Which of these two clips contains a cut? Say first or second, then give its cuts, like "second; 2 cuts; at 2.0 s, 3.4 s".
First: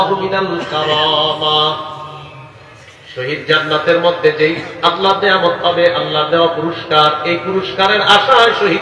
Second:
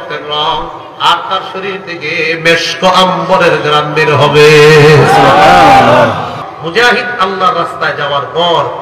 second; 1 cut; at 6.5 s